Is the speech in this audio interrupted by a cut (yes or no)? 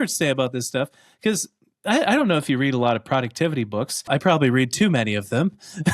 yes